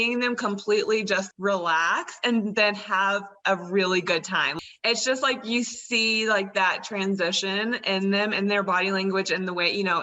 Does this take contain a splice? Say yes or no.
yes